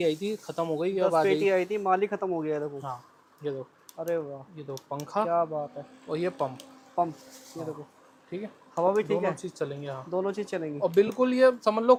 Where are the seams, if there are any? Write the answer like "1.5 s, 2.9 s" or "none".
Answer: none